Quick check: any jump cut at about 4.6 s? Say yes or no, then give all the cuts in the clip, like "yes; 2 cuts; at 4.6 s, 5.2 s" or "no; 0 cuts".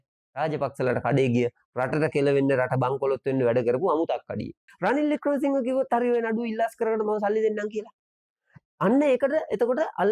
yes; 1 cut; at 4.6 s